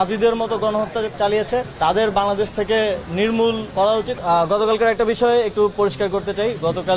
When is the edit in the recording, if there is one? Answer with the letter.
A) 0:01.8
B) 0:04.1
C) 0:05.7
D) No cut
B